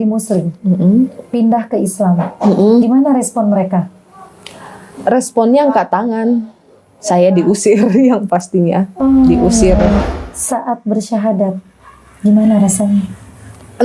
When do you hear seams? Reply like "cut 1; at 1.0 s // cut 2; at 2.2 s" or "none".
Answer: cut 1; at 10.0 s